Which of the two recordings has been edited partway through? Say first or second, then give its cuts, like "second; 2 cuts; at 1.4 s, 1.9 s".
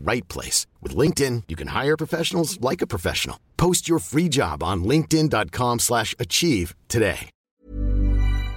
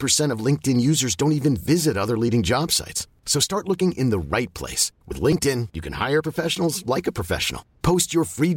first; 1 cut; at 7.3 s